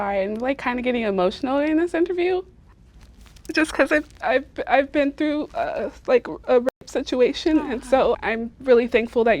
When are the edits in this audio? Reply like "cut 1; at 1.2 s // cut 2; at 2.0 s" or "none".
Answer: cut 1; at 8.2 s